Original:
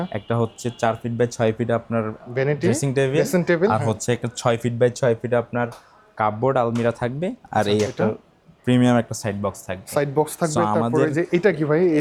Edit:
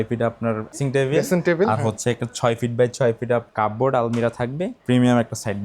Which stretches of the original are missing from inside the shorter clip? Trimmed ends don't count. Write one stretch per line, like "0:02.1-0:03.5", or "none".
0:02.3-0:02.8
0:05.5-0:06.1
0:07.4-0:08.5